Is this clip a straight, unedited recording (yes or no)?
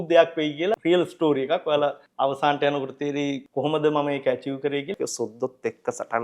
no